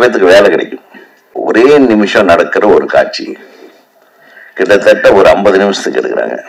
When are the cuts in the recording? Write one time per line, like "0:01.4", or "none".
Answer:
0:01.3